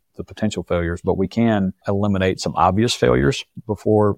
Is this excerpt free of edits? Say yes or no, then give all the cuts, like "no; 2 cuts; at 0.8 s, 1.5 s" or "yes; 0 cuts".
no; 1 cut; at 1.8 s